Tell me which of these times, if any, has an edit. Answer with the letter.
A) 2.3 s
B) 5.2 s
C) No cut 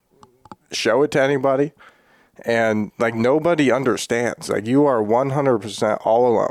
C